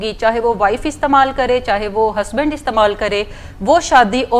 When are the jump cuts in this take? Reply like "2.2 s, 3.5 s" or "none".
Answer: none